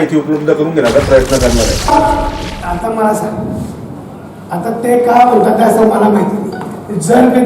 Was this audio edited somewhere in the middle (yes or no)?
yes